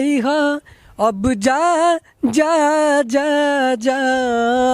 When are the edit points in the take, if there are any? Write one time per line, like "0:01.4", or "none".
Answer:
none